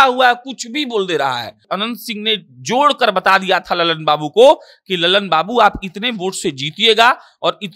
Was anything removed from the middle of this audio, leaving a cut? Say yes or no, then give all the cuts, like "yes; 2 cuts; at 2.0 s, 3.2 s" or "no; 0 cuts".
yes; 1 cut; at 1.6 s